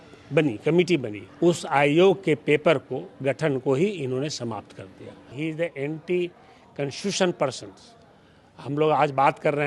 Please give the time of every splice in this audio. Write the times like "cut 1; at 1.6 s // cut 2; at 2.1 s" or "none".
cut 1; at 1.2 s // cut 2; at 5.3 s